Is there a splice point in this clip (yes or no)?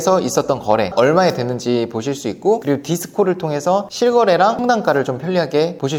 no